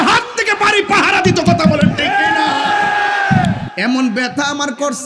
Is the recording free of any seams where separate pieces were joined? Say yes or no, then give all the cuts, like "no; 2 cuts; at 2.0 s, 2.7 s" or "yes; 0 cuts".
no; 1 cut; at 3.7 s